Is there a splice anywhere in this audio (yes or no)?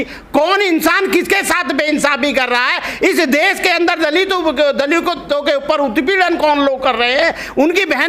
no